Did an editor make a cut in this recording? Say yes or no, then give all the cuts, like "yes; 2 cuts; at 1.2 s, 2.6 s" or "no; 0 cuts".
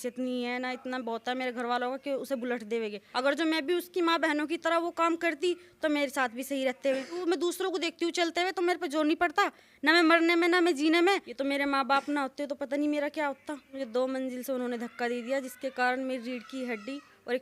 yes; 4 cuts; at 3.0 s, 7.2 s, 11.3 s, 13.7 s